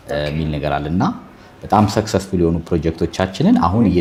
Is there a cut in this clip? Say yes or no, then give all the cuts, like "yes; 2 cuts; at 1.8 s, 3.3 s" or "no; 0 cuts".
no; 0 cuts